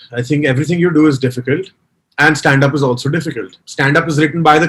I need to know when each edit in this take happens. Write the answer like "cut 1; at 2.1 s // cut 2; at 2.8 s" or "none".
cut 1; at 3.6 s